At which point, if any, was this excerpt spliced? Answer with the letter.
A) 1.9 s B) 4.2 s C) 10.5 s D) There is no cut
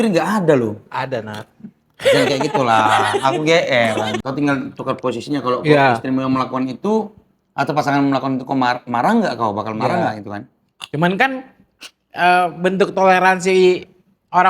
B